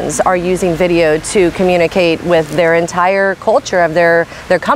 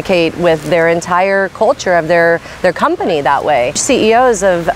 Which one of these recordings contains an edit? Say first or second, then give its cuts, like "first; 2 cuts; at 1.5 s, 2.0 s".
second; 1 cut; at 3.8 s